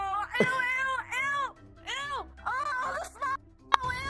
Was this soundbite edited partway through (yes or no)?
no